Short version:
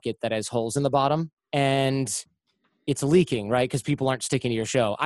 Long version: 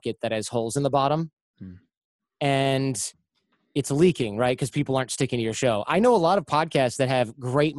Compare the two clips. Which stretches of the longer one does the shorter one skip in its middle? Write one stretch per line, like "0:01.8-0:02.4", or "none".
0:01.4-0:02.3